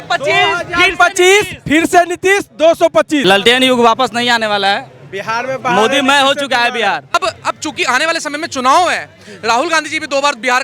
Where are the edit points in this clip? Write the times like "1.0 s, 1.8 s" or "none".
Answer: 3.2 s, 7.1 s